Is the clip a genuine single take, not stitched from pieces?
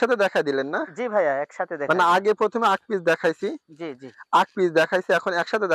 yes; 0 cuts

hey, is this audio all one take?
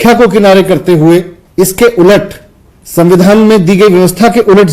no; 1 cut; at 1.4 s

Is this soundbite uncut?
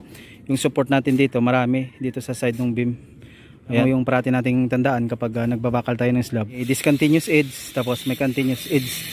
no; 2 cuts; at 3.8 s, 6.6 s

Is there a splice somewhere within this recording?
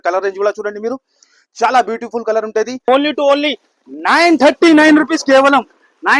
yes; 1 cut; at 2.9 s

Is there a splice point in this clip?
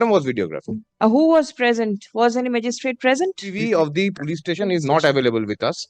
yes; 1 cut; at 3.5 s

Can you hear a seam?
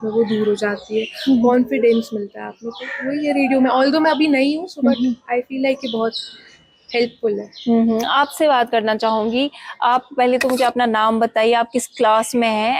no; 0 cuts

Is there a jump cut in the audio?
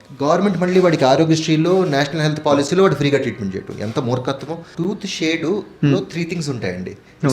yes; 1 cut; at 4.7 s

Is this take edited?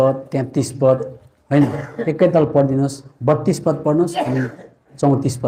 no; 0 cuts

